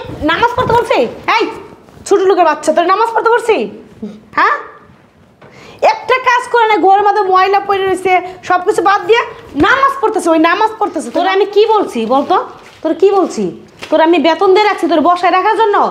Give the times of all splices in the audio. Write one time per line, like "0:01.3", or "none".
0:11.0